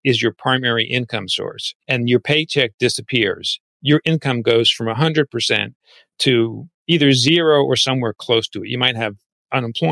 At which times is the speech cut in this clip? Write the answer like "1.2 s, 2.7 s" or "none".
1.7 s